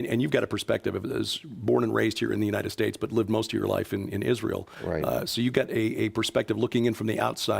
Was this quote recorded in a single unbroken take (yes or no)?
no